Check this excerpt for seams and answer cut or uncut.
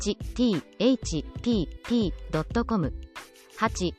uncut